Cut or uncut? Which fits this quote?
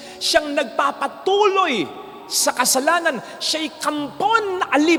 uncut